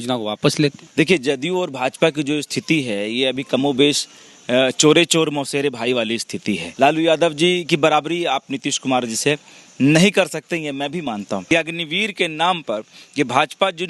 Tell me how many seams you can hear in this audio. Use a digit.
3